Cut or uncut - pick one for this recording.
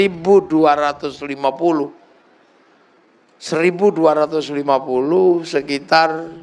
uncut